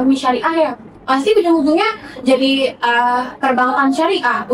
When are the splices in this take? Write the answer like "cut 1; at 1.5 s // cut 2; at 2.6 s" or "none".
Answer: none